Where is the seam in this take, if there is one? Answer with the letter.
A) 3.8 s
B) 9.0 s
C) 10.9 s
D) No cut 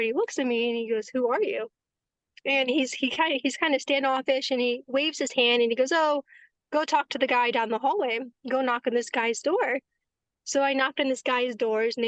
D